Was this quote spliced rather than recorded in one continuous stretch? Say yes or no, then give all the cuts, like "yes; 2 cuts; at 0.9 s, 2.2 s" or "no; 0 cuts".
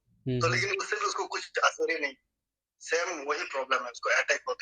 no; 0 cuts